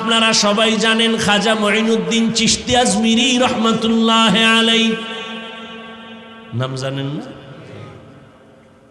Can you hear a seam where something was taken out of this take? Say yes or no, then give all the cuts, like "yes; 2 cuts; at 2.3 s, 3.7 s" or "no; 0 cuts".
no; 0 cuts